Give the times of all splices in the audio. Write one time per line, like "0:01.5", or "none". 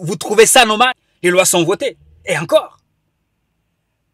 0:01.1